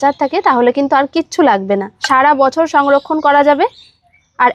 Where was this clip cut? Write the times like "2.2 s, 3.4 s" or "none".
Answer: 1.9 s